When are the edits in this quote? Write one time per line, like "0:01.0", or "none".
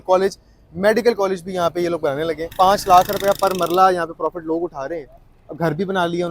0:02.5